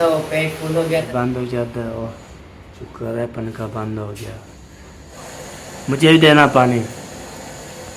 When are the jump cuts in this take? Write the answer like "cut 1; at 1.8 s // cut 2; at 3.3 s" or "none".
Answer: cut 1; at 1.1 s // cut 2; at 5.2 s